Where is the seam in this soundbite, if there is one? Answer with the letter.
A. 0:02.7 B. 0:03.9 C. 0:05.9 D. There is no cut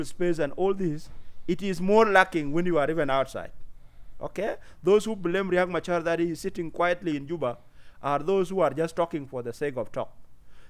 D